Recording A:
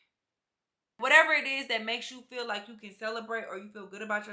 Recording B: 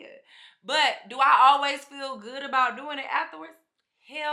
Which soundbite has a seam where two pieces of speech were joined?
A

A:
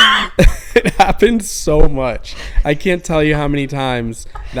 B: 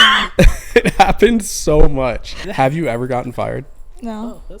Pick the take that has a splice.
B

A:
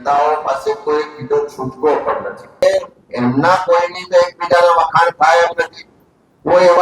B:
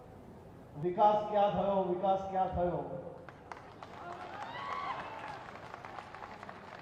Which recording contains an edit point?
A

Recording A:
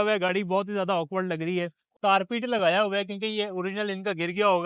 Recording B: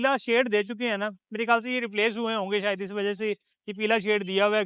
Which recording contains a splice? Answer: A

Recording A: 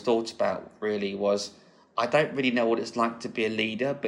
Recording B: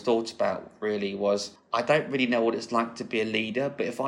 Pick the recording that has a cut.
B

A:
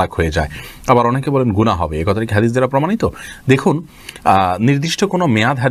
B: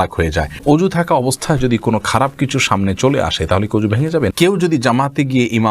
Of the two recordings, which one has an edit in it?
B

